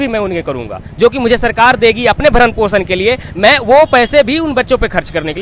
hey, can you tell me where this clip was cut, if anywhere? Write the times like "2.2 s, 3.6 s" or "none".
none